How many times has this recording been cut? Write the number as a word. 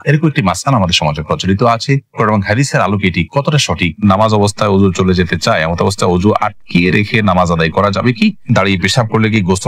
two